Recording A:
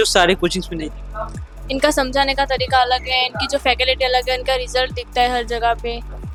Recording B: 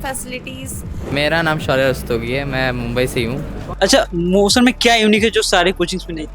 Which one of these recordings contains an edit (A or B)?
B